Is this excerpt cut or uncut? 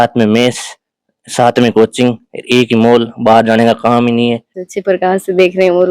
cut